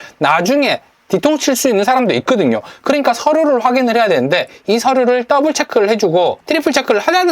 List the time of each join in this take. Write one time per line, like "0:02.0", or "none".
0:06.4